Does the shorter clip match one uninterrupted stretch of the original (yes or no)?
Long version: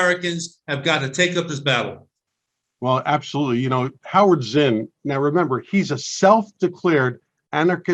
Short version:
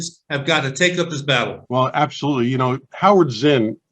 no